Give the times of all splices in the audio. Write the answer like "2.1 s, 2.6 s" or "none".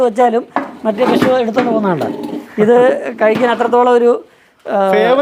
none